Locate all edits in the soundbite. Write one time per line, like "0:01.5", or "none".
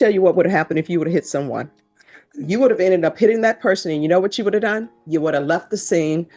none